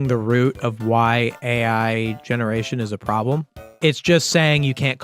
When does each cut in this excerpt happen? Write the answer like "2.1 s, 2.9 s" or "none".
3.6 s